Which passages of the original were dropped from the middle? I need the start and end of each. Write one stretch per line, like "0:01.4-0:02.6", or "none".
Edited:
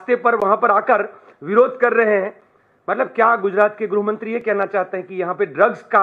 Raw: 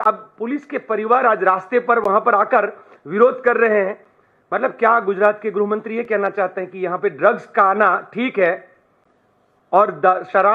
none